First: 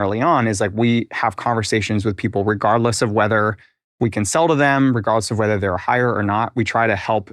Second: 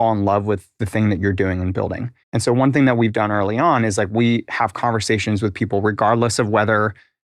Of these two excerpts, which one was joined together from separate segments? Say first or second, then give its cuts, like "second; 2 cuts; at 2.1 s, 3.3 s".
second; 1 cut; at 2.1 s